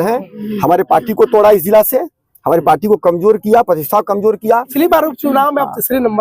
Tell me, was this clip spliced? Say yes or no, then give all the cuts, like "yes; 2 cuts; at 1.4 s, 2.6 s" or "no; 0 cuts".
yes; 1 cut; at 4.7 s